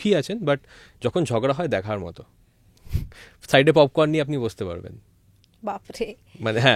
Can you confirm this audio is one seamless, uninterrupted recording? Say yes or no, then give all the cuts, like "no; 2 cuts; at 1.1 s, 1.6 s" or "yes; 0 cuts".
yes; 0 cuts